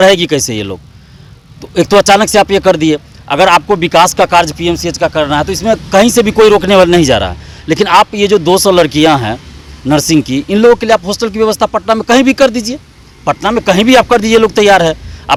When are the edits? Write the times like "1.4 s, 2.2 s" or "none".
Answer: none